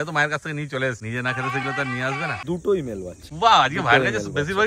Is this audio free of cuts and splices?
no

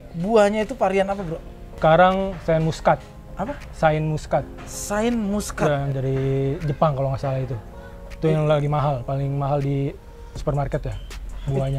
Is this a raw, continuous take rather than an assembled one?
no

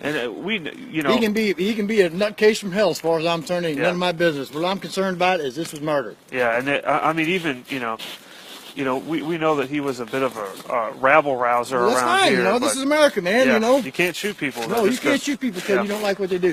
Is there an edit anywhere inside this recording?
no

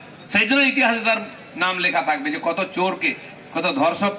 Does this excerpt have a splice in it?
no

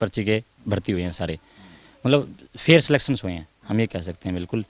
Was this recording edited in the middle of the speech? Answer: no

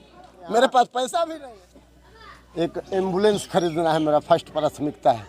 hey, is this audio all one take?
no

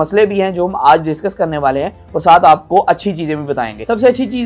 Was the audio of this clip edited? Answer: no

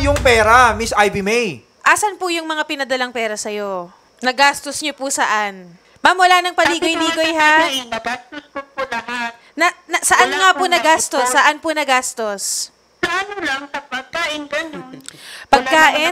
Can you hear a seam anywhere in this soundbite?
yes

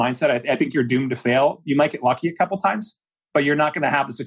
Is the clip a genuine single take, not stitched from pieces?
yes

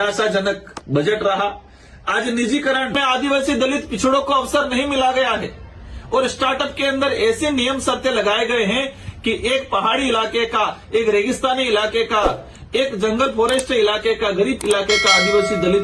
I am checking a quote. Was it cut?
yes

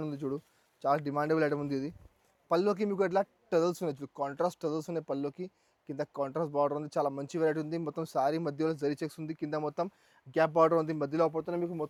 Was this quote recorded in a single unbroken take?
yes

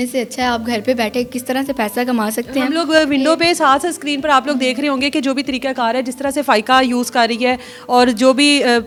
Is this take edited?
no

